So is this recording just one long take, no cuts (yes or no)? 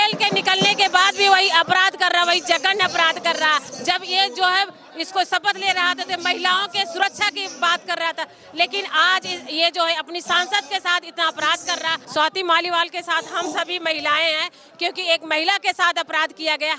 no